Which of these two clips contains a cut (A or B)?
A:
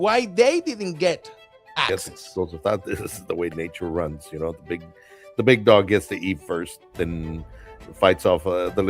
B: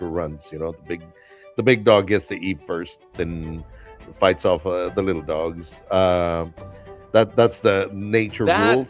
A